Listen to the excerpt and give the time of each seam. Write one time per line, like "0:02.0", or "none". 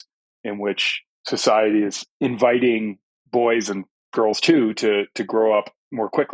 0:02.0